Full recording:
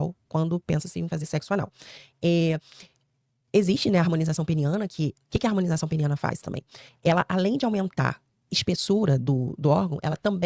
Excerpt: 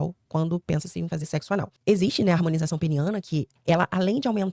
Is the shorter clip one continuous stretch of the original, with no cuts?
no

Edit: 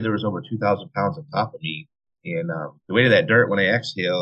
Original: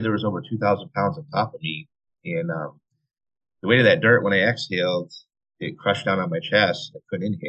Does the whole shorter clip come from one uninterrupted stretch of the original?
no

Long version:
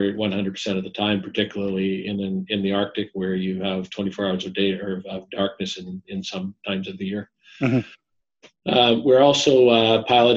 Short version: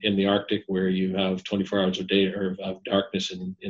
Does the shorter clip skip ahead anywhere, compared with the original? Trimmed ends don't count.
no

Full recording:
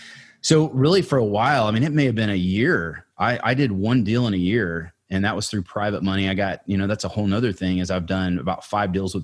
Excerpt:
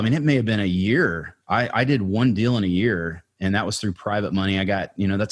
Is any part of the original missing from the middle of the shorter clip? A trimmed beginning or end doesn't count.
no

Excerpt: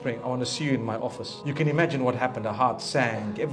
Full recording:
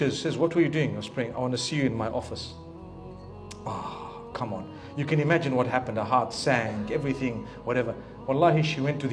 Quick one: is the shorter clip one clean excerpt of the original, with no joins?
no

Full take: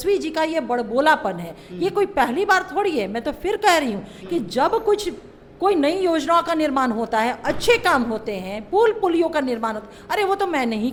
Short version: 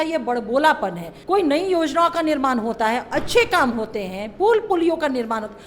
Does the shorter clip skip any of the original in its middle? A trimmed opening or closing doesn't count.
yes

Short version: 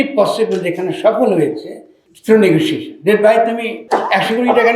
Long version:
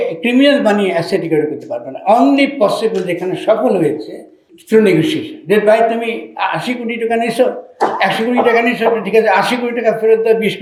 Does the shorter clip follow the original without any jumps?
no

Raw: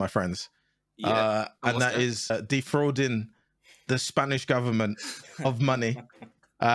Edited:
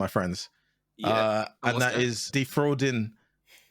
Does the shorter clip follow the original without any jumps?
no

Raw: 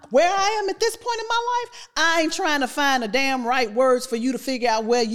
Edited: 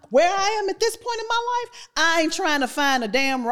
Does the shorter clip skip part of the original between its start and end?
no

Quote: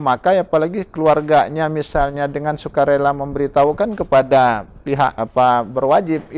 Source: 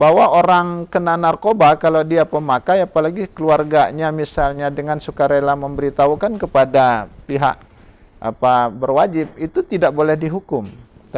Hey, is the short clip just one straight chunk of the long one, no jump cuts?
no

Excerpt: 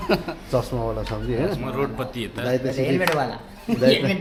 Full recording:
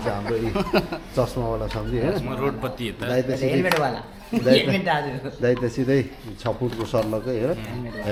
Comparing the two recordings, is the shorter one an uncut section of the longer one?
yes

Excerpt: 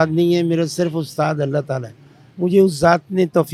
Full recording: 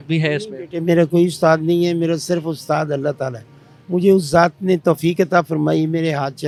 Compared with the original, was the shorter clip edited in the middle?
no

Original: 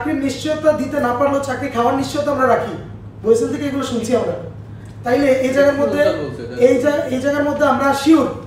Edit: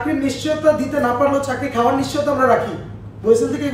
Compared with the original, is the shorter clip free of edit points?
yes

